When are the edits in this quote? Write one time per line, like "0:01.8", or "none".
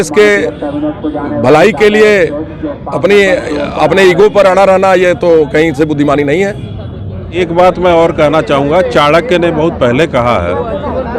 0:07.4